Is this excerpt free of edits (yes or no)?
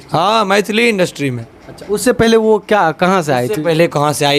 yes